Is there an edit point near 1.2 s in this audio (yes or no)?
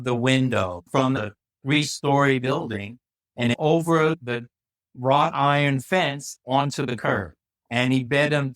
yes